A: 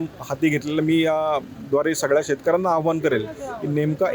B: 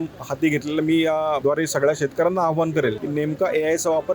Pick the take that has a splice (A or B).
B